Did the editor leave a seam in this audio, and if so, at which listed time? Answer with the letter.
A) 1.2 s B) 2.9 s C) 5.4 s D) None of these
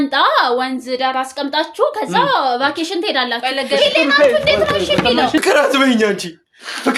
C